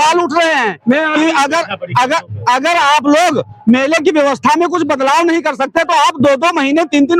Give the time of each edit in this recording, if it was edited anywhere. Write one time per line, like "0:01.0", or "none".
none